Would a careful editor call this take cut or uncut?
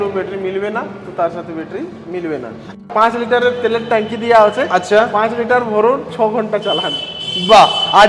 cut